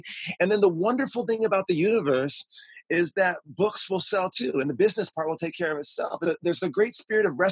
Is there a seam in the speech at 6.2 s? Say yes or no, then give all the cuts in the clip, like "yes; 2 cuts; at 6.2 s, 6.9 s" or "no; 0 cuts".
yes; 1 cut; at 6.2 s